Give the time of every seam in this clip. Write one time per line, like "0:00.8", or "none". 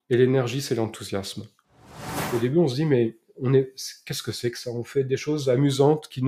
0:01.8